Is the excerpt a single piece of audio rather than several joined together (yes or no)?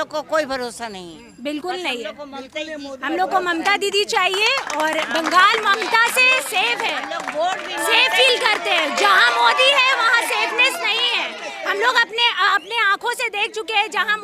yes